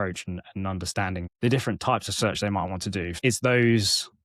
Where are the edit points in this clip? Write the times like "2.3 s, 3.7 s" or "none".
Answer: 1.3 s, 3.2 s